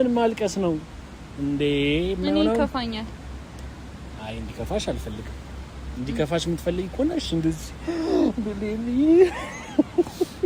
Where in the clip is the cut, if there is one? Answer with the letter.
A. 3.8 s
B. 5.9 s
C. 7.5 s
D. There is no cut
D